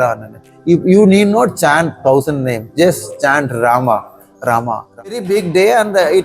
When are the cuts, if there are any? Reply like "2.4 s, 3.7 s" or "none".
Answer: 5.2 s

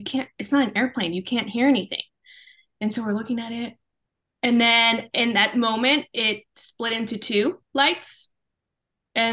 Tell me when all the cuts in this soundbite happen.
none

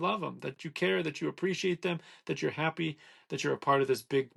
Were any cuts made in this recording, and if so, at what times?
none

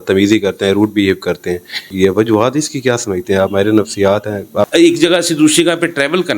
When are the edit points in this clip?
1.8 s, 4.7 s

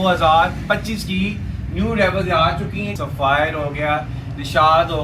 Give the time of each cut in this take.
2.9 s

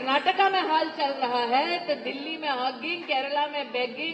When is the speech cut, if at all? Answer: none

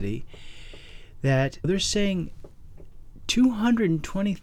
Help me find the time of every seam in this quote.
1.6 s

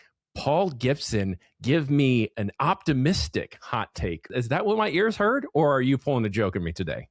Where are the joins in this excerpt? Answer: 2.3 s, 4.3 s

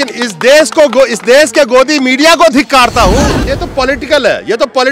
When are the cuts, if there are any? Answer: 3.5 s

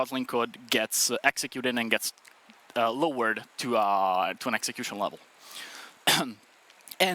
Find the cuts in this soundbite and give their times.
none

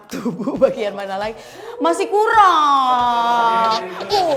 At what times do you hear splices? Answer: none

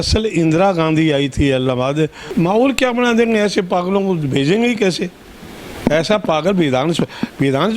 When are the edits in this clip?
2.2 s

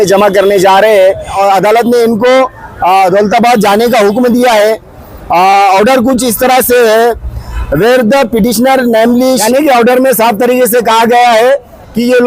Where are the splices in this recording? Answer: 1.3 s, 9.4 s

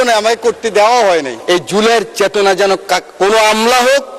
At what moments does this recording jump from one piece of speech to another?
1.3 s

